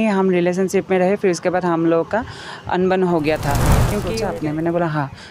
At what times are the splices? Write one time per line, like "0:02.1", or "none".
0:03.9